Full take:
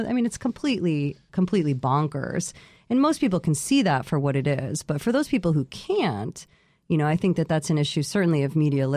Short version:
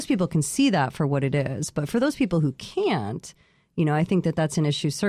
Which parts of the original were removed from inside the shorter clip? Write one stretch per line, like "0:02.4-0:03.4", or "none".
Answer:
none